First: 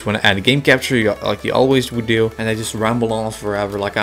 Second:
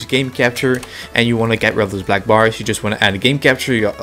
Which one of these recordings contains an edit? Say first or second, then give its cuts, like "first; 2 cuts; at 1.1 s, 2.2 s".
first; 1 cut; at 2.3 s